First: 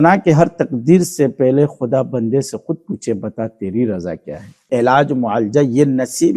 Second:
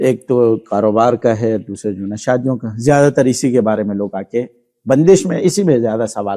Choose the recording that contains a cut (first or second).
first